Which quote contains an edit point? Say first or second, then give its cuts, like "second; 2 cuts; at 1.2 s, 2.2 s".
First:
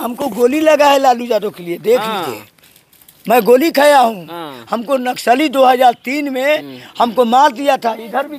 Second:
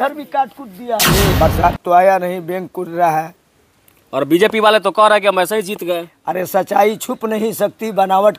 second; 1 cut; at 1.3 s